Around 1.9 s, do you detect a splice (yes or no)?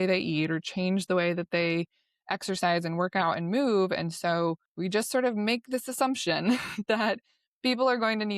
no